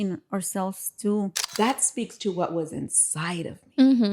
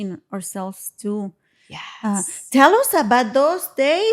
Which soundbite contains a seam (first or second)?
first